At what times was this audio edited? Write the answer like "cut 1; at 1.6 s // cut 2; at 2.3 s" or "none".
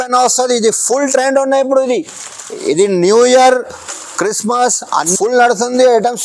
cut 1; at 5.1 s